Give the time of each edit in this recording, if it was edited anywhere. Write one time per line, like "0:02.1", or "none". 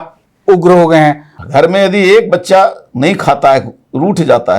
0:01.3

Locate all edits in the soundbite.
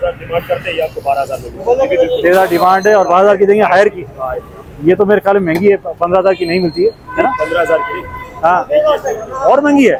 none

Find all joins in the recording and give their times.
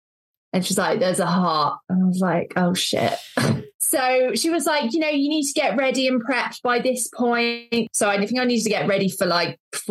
0:03.7
0:07.9

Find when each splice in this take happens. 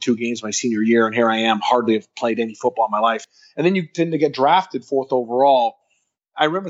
0:03.2

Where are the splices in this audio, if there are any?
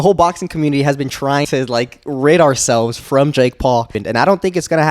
0:01.5
0:04.0

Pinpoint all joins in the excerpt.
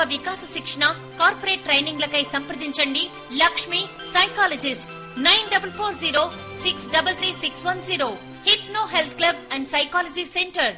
0:06.2

